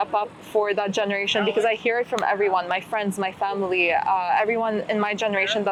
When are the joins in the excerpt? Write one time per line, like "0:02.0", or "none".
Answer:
none